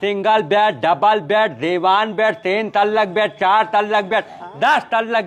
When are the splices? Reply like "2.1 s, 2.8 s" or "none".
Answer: none